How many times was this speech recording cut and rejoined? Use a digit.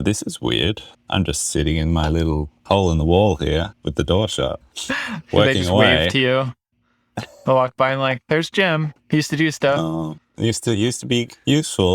4